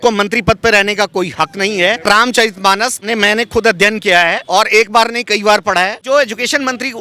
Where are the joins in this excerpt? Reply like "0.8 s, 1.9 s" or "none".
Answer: 2.0 s, 3.1 s, 4.4 s, 6.0 s